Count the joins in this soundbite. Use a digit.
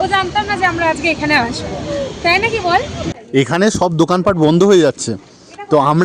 1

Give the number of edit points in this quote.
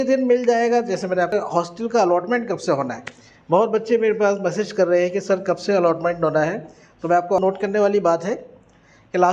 2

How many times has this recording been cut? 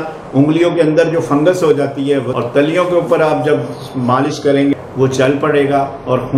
2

